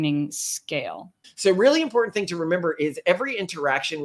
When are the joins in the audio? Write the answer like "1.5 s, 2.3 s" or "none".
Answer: 1.1 s